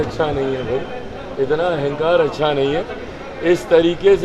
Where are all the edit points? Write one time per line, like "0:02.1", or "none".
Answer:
none